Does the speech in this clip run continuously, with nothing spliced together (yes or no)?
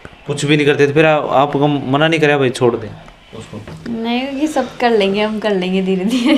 yes